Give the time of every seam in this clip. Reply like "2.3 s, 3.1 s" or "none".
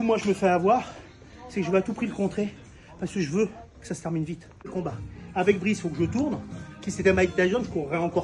4.9 s